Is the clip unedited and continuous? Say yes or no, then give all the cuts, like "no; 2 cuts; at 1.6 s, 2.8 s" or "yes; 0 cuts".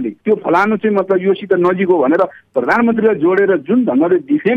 yes; 0 cuts